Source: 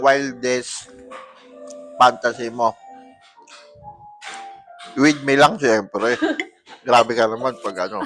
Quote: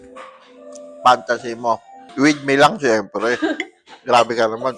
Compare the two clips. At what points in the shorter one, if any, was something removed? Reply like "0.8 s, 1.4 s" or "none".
2.0 s